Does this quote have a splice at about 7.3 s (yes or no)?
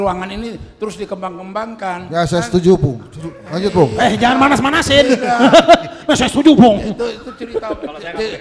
no